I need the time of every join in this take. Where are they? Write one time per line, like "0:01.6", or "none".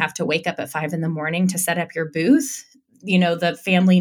none